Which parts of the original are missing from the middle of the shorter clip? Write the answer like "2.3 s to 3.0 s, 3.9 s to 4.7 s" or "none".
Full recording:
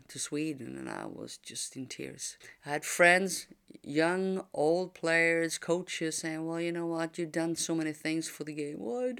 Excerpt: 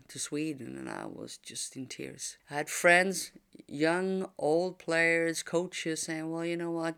2.3 s to 2.5 s